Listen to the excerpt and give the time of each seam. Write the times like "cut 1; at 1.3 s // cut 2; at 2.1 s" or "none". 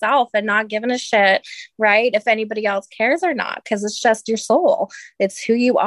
none